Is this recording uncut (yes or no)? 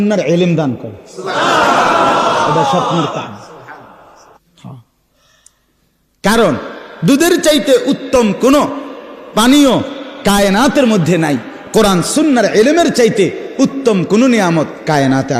no